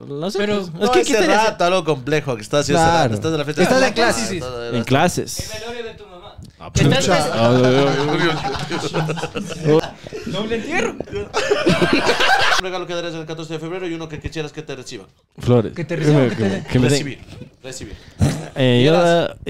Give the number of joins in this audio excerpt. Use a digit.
2